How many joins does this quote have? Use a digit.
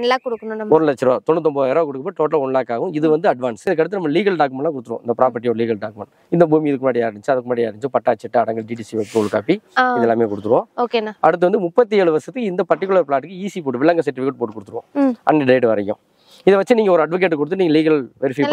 1